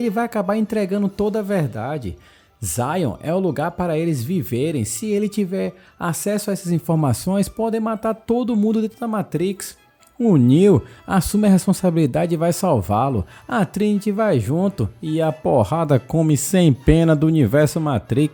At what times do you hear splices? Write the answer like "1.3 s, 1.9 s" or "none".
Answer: none